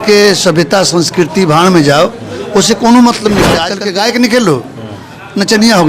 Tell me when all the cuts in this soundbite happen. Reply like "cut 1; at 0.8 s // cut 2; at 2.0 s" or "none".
cut 1; at 3.7 s